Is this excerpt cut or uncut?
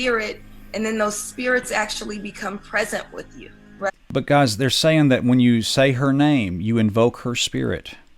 cut